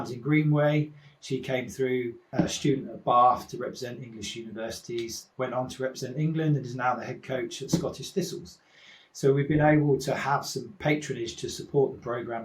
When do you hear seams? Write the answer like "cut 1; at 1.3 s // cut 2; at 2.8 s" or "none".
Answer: cut 1; at 2.3 s // cut 2; at 10.6 s